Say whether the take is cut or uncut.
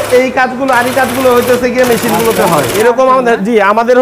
cut